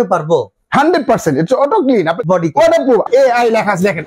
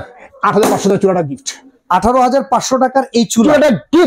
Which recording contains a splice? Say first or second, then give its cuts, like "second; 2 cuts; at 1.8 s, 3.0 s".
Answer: first; 2 cuts; at 2.2 s, 3.1 s